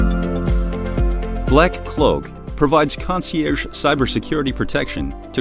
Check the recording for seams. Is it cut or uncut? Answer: cut